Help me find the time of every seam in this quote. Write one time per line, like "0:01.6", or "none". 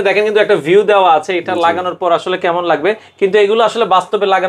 none

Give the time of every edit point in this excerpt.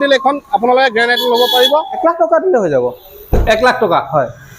0:02.0

